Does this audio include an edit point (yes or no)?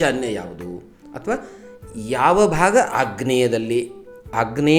no